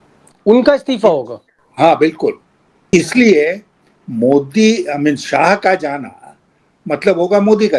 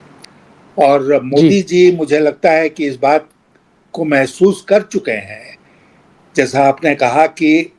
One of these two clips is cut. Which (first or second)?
first